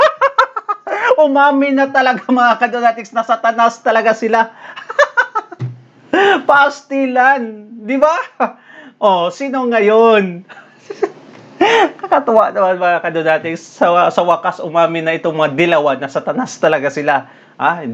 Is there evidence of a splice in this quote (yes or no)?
no